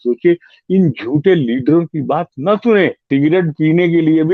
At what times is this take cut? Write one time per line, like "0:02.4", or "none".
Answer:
0:03.0